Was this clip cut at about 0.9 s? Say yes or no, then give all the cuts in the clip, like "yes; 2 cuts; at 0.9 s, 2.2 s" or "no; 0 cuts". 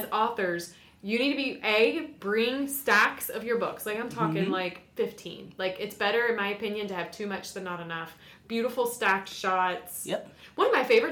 no; 0 cuts